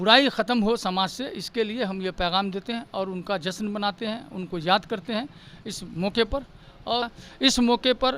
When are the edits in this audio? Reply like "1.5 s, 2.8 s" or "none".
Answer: 7.1 s